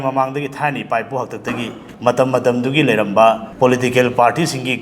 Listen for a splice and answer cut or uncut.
cut